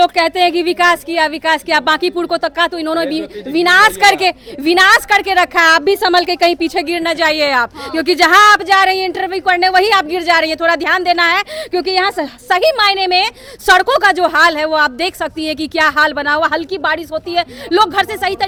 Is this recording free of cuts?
yes; 0 cuts

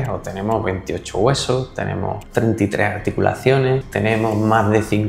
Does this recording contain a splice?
yes; 2 cuts; at 2.2 s, 3.9 s

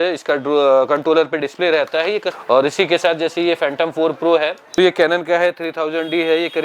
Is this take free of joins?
no; 2 cuts; at 2.3 s, 4.6 s

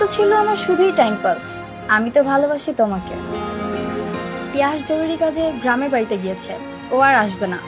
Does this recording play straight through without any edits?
no; 1 cut; at 3.2 s

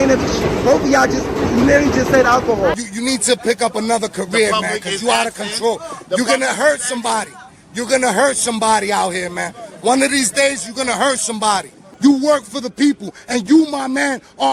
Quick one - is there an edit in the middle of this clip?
yes; 2 cuts; at 2.8 s, 11.8 s

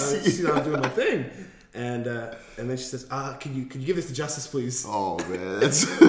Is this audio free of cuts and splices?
yes; 0 cuts

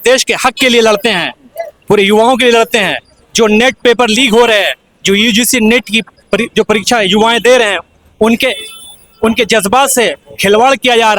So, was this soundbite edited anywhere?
no; 0 cuts

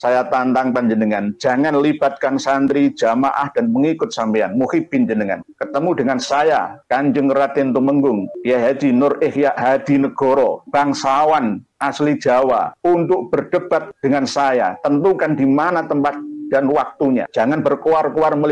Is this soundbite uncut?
yes; 0 cuts

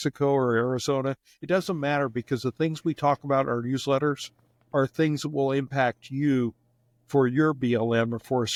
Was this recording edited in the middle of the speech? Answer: no; 0 cuts

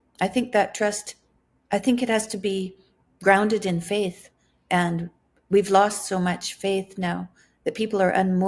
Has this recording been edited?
no; 0 cuts

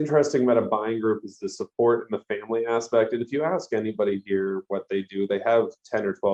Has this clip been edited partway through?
no; 0 cuts

